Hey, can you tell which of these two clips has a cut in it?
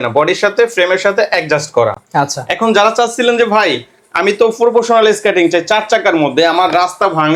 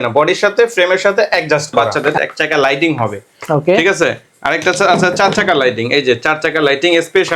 second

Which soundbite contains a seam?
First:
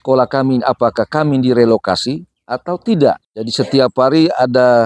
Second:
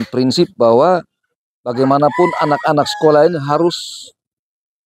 first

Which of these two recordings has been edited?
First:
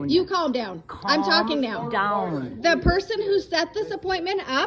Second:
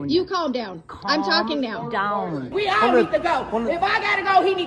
second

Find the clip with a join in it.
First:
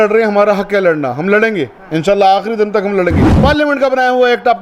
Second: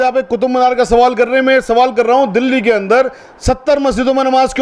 first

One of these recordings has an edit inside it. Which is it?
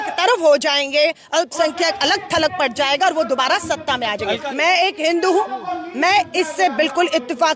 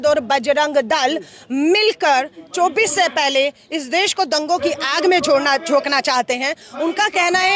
first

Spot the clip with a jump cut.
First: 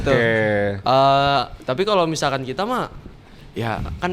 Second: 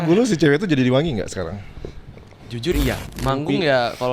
second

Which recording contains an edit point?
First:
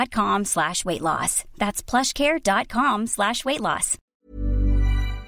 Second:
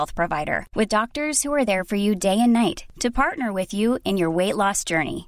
first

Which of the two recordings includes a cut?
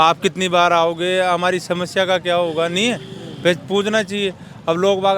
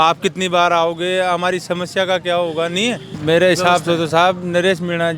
second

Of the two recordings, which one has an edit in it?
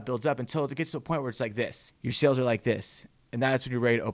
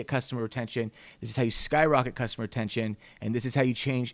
first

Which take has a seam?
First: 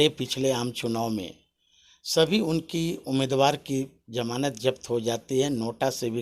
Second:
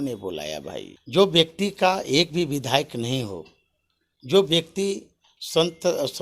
second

